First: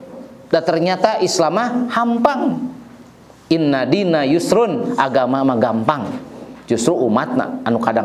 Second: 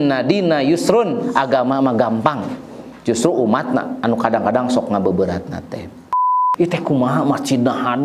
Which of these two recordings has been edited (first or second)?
second